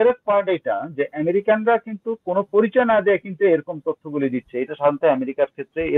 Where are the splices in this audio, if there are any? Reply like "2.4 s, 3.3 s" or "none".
none